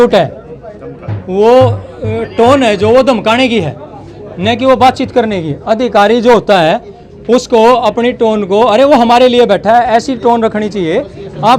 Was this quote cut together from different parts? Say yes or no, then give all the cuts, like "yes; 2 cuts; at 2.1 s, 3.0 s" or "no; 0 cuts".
no; 0 cuts